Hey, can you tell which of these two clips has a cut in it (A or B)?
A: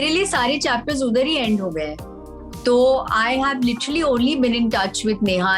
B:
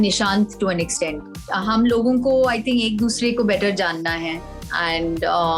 B